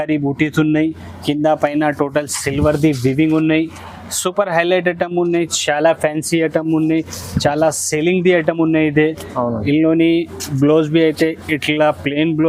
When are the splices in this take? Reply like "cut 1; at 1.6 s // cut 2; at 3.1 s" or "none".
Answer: none